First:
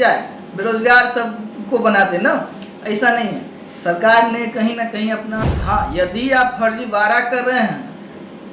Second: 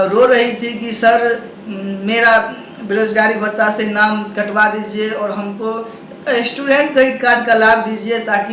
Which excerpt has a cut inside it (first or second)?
first